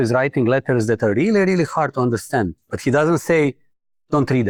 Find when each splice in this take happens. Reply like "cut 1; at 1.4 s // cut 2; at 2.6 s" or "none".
none